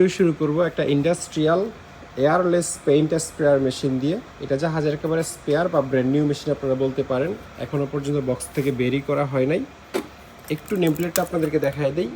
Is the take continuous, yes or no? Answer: yes